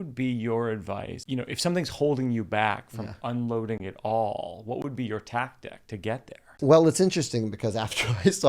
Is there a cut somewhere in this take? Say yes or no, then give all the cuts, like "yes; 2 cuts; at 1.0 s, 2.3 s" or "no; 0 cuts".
yes; 2 cuts; at 1.1 s, 6.4 s